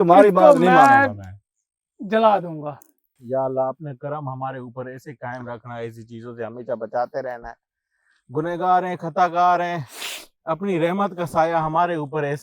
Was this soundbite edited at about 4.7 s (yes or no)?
no